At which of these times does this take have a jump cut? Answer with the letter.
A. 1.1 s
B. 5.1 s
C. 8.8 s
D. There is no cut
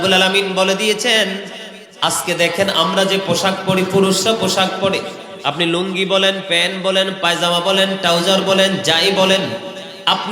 D